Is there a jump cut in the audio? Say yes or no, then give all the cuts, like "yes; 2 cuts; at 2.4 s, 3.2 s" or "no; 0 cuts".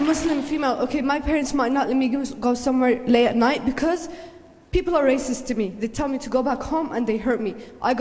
no; 0 cuts